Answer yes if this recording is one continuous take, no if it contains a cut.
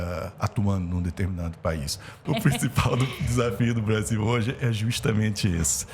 no